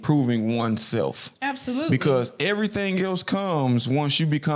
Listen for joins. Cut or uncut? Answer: uncut